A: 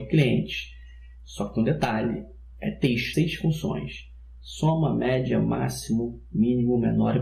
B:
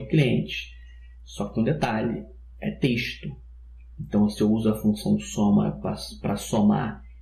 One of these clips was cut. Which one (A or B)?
B